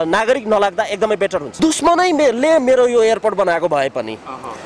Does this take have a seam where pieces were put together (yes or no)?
yes